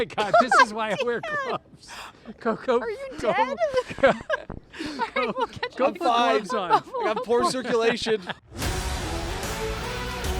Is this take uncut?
no; 1 cut; at 8.4 s

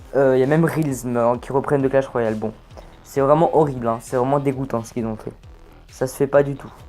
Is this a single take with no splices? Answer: no; 1 cut; at 4.0 s

